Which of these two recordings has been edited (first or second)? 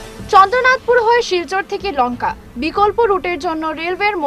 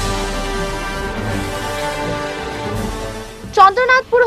second